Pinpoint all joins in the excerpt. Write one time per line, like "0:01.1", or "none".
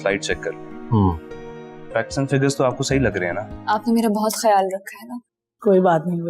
0:03.5